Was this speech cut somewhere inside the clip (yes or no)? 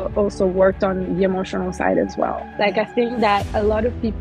yes